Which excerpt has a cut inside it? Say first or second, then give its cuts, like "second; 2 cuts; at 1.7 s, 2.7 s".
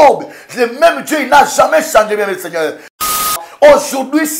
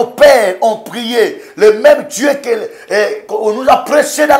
first; 1 cut; at 3.3 s